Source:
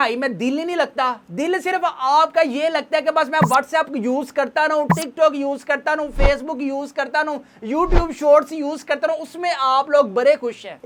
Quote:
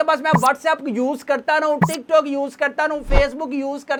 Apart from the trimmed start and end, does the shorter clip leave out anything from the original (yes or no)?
no